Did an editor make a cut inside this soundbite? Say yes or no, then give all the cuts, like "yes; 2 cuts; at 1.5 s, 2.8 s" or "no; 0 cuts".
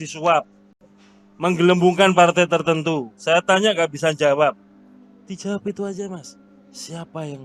no; 0 cuts